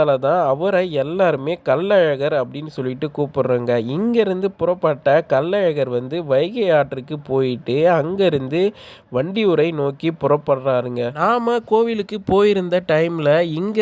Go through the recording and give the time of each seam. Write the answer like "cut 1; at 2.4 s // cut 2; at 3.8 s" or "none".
none